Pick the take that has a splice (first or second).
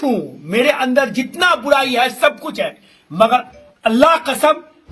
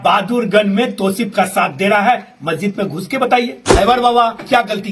second